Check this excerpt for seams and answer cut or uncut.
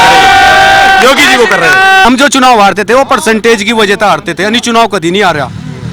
cut